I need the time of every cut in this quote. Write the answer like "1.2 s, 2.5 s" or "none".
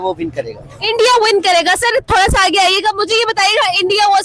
none